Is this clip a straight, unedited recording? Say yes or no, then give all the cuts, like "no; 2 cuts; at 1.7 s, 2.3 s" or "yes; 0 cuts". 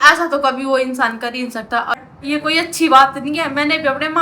no; 1 cut; at 1.9 s